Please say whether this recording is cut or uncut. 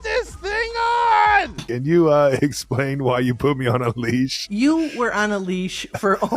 cut